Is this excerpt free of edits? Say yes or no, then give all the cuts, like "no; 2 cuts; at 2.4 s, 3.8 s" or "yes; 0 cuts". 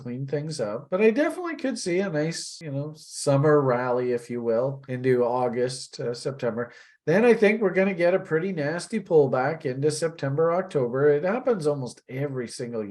no; 2 cuts; at 2.5 s, 4.9 s